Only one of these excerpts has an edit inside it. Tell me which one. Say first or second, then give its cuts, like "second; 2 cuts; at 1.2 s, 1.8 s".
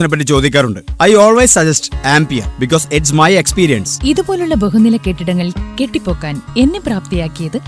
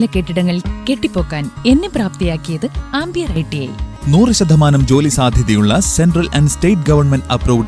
second; 1 cut; at 3.9 s